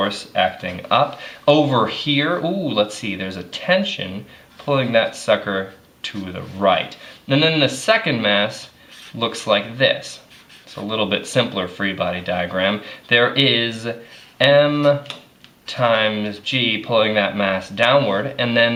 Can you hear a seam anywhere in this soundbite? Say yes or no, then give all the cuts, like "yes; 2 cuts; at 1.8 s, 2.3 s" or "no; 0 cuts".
no; 0 cuts